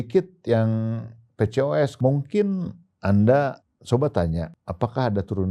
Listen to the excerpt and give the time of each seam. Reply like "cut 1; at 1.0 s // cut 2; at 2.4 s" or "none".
cut 1; at 1.9 s // cut 2; at 3.7 s // cut 3; at 4.6 s